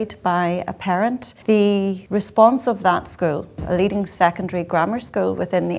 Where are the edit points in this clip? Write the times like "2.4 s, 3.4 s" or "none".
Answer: 1.3 s, 2.0 s, 3.6 s

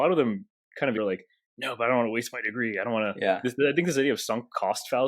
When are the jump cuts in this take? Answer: 1.0 s

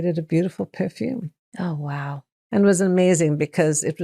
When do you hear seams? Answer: 1.4 s

